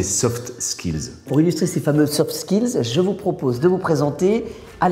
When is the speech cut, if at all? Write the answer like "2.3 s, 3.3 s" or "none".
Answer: 1.3 s